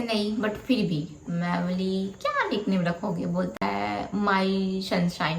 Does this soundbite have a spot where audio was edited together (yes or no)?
no